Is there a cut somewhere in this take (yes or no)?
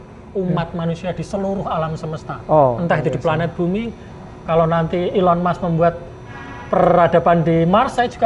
no